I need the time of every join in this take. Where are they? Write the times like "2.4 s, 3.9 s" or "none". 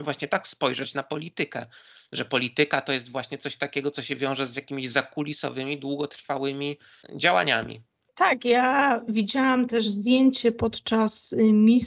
8.1 s